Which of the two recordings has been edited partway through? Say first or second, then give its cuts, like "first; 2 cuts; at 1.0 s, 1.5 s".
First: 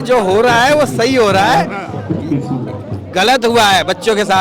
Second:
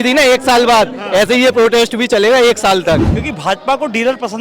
second; 1 cut; at 3.2 s